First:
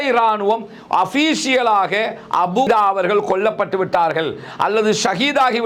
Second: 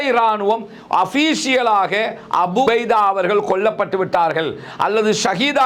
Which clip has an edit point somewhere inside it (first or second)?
first